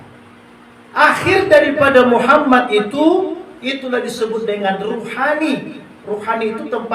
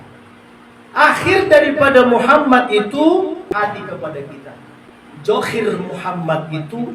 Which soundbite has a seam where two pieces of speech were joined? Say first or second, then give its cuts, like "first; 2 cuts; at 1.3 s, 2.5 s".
second; 2 cuts; at 3.5 s, 5.2 s